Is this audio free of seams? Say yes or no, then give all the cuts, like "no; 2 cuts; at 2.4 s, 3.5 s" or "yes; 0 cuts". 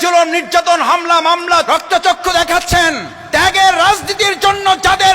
no; 2 cuts; at 1.7 s, 3.1 s